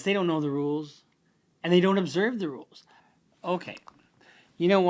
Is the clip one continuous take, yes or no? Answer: no